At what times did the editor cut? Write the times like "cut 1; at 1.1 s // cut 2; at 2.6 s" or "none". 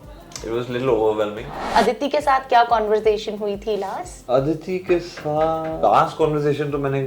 cut 1; at 1.5 s // cut 2; at 5.8 s